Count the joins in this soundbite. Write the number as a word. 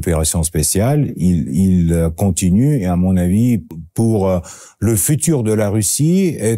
one